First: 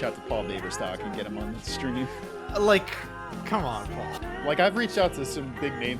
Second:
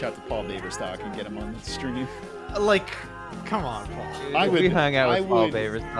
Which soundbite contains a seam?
first; 1 cut; at 4.2 s

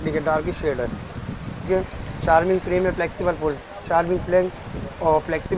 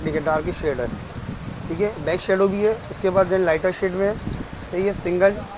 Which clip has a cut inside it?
first; 1 cut; at 1.6 s

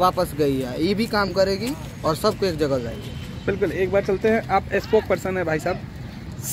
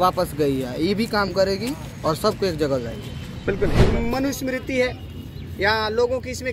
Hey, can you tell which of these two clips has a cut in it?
second; 1 cut; at 3.9 s

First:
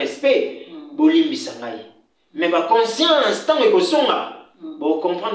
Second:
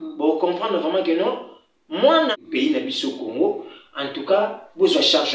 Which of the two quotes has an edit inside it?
second; 1 cut; at 2.3 s

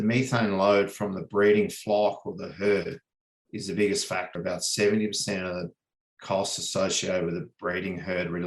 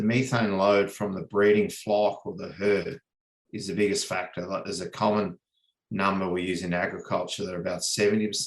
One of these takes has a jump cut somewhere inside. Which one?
first; 1 cut; at 4.4 s

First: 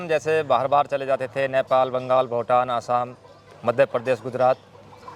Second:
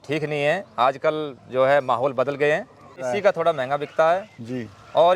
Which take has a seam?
second; 1 cut; at 3.1 s

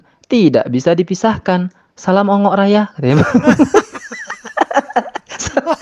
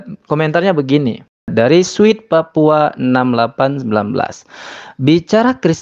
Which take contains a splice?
second; 1 cut; at 1.5 s

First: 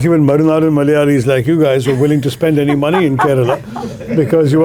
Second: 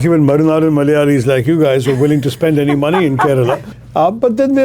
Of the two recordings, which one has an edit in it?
second; 1 cut; at 3.7 s

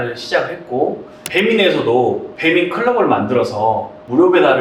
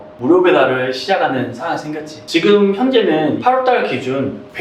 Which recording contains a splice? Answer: second; 1 cut; at 2.1 s

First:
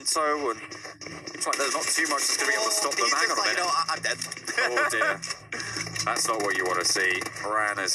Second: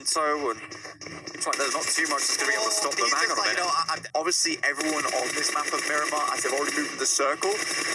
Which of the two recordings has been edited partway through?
second; 1 cut; at 4.0 s

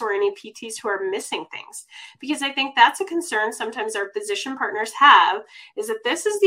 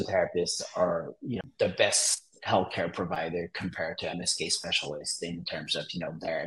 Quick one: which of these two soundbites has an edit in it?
second; 1 cut; at 1.4 s

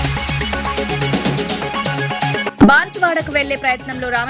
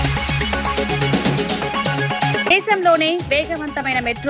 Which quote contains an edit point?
first; 1 cut; at 2.5 s

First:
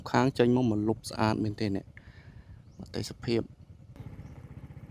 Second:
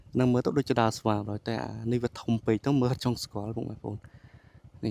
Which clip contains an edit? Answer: first; 1 cut; at 4.0 s

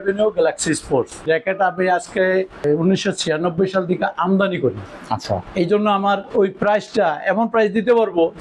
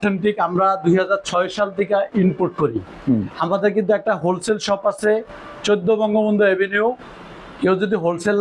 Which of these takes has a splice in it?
first; 3 cuts; at 1.2 s, 2.6 s, 4.9 s

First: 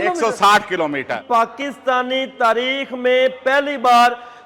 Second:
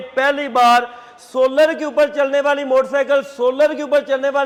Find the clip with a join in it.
first; 1 cut; at 1.2 s

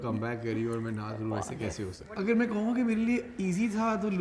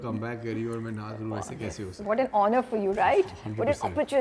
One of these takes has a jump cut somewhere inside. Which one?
first; 1 cut; at 1.9 s

